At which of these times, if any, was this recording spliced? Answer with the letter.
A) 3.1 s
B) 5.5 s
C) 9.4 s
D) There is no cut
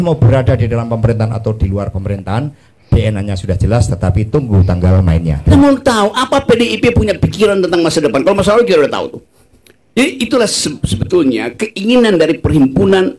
B